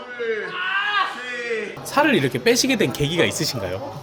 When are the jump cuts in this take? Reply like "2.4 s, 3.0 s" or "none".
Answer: 1.8 s